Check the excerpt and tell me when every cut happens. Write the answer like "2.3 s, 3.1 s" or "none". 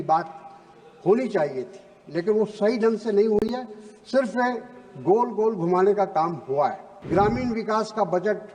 6.9 s